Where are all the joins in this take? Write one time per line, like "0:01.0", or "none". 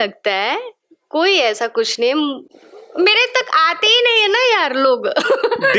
none

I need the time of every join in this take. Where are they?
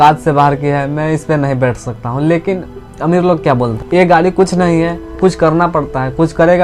0:03.8
0:05.0

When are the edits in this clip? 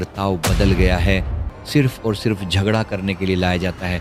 0:01.5

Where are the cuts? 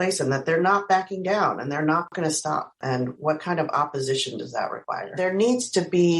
0:05.1

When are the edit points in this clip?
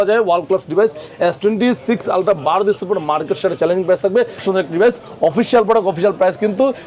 0:04.4

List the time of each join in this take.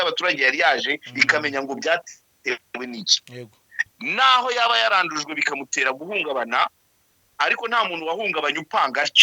0:03.7

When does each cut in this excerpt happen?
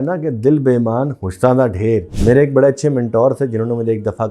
0:02.1

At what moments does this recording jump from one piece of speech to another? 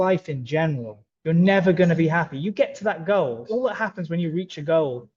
none

